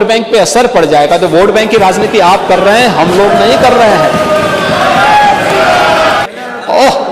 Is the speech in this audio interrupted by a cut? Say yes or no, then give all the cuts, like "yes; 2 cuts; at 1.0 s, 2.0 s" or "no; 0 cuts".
yes; 1 cut; at 6.2 s